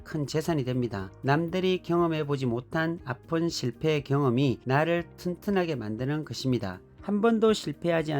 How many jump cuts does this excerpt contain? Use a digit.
1